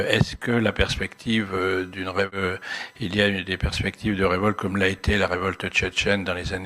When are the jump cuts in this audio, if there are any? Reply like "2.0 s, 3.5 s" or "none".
2.3 s